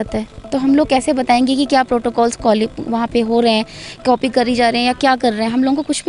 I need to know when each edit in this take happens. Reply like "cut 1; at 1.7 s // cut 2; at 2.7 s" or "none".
none